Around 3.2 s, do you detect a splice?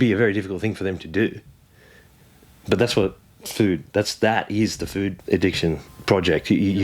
no; 2 cuts; at 5.2 s, 5.9 s

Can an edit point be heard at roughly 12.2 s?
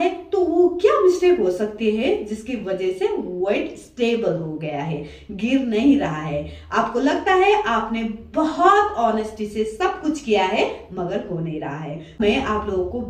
yes; 1 cut; at 12.2 s

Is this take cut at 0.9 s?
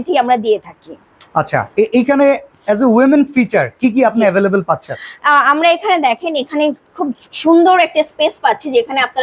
no; 0 cuts

